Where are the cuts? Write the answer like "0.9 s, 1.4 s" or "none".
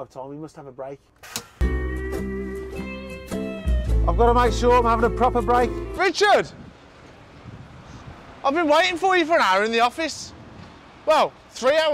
1.2 s, 6.0 s